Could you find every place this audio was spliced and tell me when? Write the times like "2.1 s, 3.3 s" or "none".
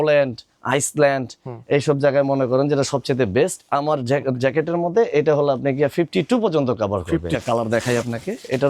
7.3 s